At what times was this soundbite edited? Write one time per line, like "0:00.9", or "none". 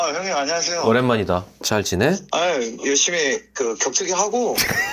0:01.6
0:02.2